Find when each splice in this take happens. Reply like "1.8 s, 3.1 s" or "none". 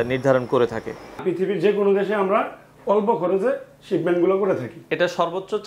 1.2 s